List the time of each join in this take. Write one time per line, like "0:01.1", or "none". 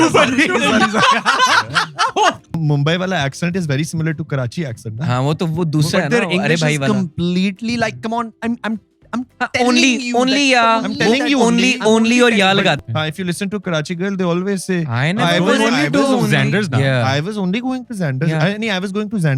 0:02.6
0:12.8